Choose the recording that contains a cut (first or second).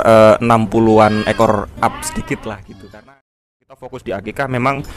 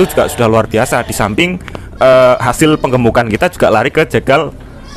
first